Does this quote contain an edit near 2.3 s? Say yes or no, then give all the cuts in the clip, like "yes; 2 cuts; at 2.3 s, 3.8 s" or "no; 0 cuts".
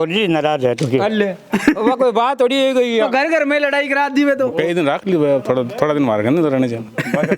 no; 1 cut; at 4.5 s